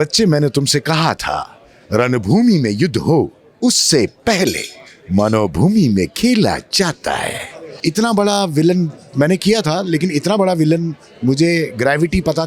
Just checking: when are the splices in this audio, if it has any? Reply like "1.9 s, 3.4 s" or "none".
7.8 s